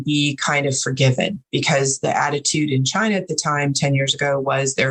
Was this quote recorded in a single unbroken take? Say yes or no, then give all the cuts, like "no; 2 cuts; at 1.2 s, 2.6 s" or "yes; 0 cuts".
yes; 0 cuts